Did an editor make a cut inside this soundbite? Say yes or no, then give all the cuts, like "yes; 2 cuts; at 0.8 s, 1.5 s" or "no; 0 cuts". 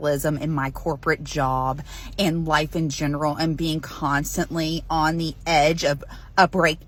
no; 0 cuts